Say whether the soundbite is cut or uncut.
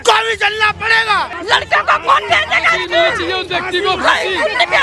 cut